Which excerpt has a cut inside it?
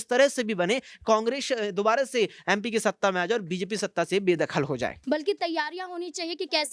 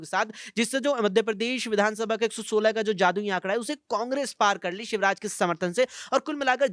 first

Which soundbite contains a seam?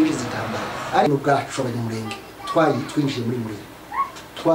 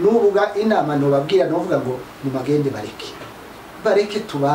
first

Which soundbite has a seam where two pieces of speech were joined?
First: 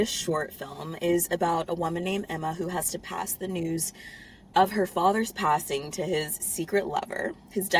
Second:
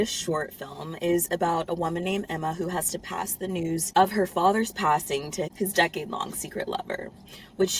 second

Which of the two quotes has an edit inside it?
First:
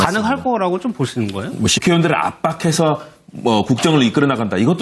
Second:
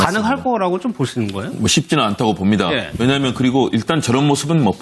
second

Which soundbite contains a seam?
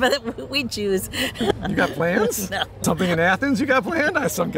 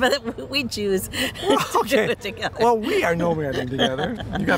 first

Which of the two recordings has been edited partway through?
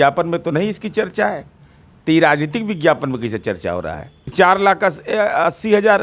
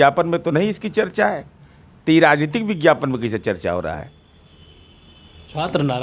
first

